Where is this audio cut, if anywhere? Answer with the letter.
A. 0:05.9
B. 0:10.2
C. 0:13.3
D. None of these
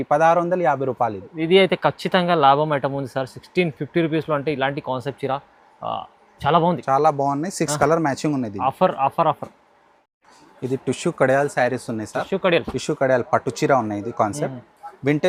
D